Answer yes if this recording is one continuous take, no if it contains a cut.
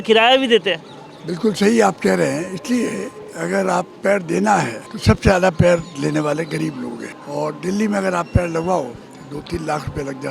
no